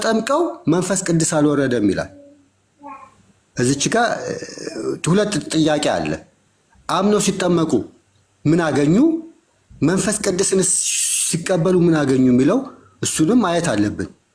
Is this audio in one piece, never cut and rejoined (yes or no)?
yes